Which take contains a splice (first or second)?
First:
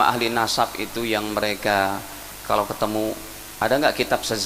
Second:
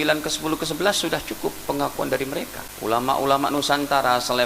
second